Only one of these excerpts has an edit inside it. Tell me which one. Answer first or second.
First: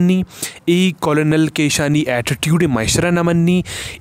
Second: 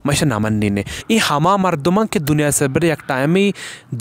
second